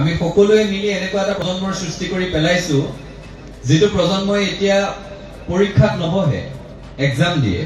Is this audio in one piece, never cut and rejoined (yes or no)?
no